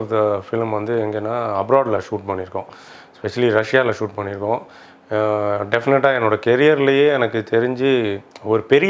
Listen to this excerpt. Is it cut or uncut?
uncut